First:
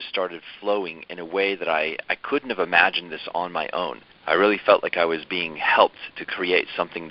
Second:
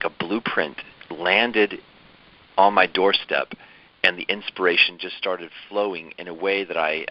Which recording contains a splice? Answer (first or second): first